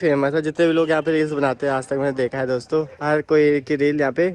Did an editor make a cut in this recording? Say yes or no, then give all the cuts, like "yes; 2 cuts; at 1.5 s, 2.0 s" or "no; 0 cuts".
no; 0 cuts